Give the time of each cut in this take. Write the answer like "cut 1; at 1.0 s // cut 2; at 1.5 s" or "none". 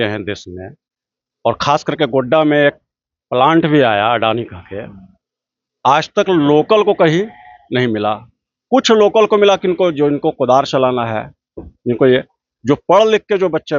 none